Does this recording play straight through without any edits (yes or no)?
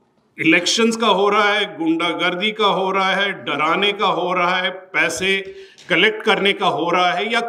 yes